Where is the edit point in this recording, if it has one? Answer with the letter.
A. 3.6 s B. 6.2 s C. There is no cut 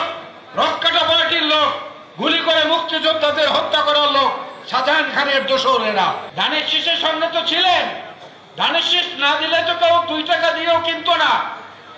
B